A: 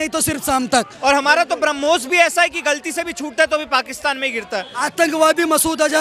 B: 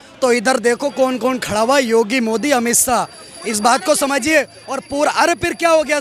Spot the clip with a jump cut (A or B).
A